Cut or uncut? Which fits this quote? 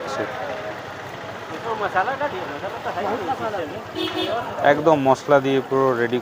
uncut